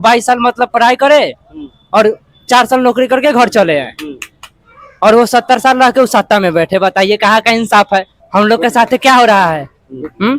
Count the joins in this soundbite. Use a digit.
1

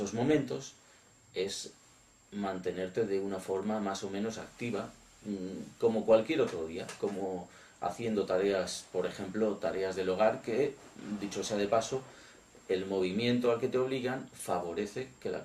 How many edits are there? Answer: 1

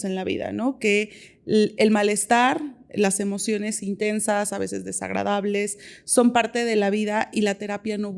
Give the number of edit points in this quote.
0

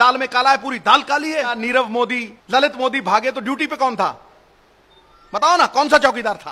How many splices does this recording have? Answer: 2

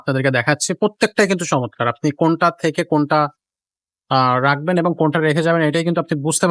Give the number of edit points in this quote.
0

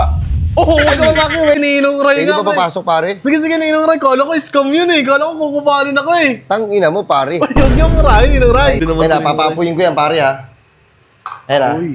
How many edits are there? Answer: 2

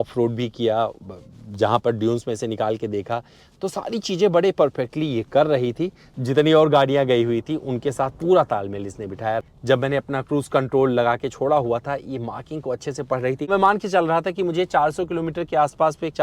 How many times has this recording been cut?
3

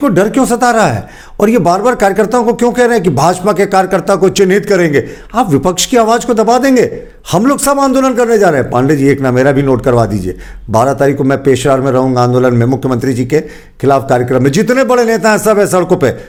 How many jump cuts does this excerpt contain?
0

